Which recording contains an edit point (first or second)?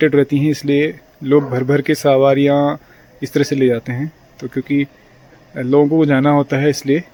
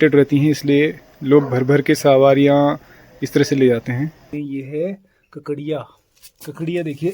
second